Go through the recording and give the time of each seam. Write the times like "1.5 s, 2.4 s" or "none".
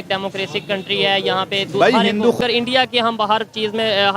2.4 s